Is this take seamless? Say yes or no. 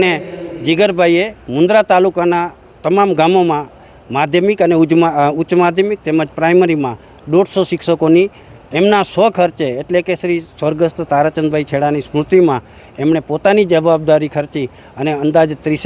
yes